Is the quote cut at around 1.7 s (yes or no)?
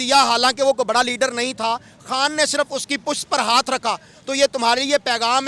no